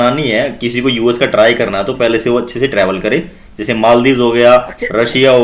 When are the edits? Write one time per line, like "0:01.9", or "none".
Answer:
none